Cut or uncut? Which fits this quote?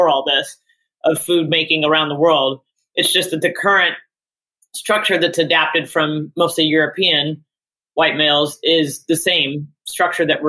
uncut